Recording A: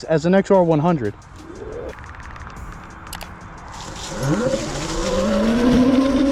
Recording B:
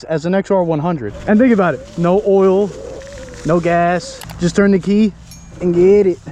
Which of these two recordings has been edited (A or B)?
B